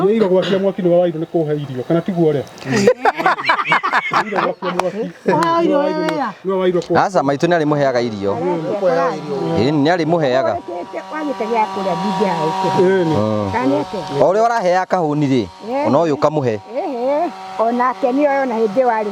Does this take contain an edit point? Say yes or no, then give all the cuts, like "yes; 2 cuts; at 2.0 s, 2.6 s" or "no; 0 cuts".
no; 0 cuts